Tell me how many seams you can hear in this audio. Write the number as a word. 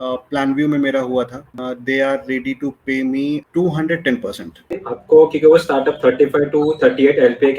three